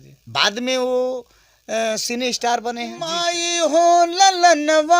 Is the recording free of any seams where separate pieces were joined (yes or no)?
no